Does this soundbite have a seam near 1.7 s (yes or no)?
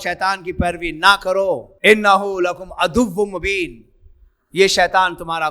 yes